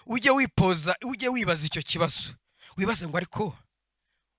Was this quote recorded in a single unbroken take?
yes; 0 cuts

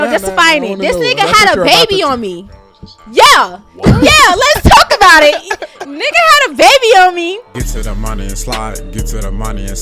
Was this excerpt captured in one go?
no; 1 cut; at 7.5 s

